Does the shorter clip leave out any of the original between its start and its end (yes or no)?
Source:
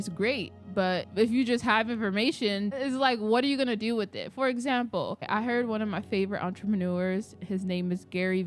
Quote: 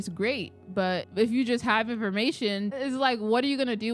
no